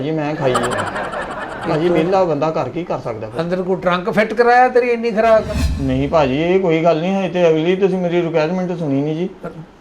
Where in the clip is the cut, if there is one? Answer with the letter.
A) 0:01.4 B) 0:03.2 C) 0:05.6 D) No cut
C